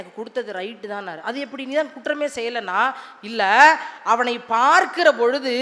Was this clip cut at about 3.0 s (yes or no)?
no